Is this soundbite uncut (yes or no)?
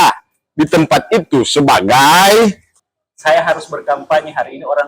no